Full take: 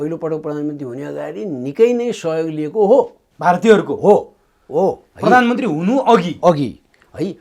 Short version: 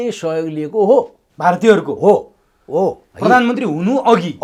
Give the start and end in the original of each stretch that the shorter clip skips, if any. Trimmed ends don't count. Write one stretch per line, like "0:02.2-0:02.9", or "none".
none

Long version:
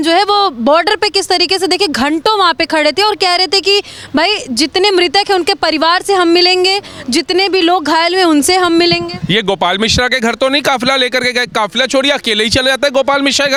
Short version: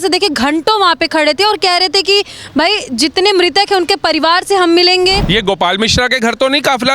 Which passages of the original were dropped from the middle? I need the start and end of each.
0:06.8-0:09.2

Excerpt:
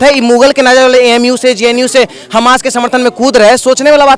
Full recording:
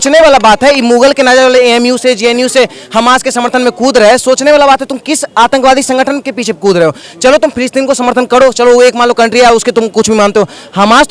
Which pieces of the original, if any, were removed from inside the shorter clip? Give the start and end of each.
none

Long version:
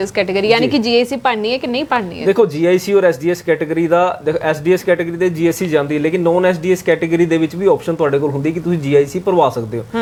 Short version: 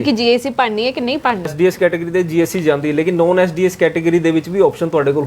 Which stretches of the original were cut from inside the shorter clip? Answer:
0:02.2-0:04.6

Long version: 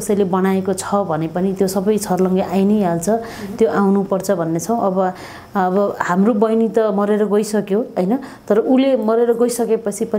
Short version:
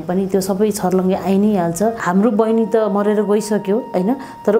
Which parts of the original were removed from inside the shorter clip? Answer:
0:03.3-0:06.0

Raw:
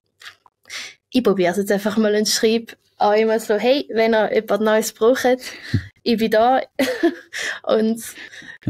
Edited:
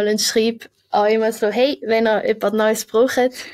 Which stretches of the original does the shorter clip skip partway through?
none

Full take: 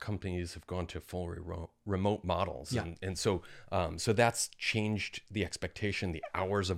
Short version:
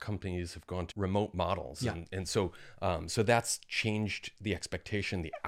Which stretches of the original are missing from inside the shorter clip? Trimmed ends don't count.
0:00.9-0:01.8

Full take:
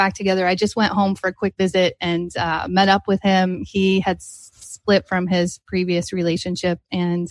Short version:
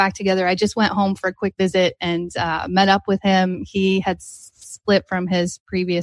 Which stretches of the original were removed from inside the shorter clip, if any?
none

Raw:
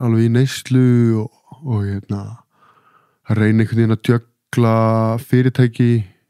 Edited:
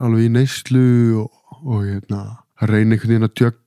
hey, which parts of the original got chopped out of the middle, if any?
0:02.4-0:03.1

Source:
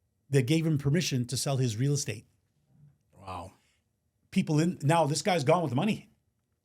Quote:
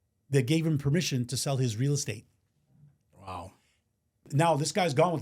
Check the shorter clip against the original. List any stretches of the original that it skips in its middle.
0:04.3-0:04.8

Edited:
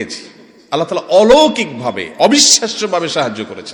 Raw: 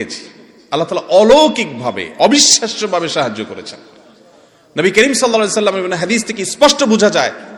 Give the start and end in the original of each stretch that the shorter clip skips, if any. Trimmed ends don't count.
none

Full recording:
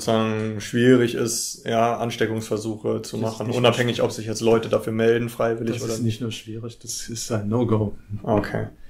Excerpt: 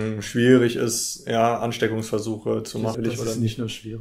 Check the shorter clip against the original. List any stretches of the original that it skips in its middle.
0:03.4-0:05.6

